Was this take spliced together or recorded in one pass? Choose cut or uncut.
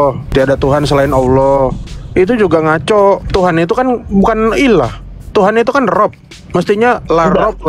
uncut